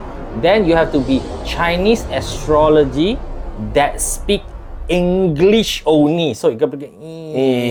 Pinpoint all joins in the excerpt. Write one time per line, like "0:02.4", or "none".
none